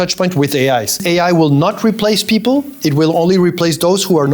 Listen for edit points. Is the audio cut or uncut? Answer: cut